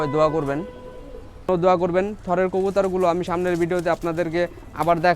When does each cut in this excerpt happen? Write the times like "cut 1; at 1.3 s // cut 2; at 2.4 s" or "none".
cut 1; at 1.5 s